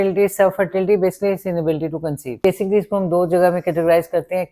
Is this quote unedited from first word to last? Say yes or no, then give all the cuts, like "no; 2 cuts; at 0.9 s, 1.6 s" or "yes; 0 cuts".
no; 1 cut; at 2.4 s